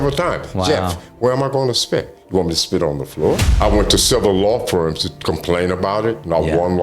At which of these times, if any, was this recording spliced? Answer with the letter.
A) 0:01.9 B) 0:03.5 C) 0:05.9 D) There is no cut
B